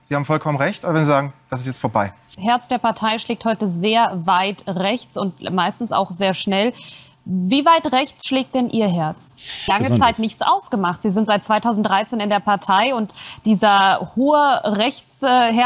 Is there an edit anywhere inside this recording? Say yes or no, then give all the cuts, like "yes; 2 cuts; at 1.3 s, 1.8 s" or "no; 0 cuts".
yes; 2 cuts; at 2.3 s, 9.7 s